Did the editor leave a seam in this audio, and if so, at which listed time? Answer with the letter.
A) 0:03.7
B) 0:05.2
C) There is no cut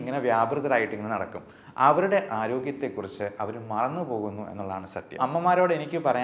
B